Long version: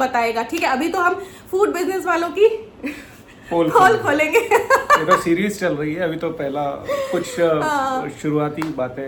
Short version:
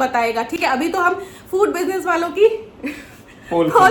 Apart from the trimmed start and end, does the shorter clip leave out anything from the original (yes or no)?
no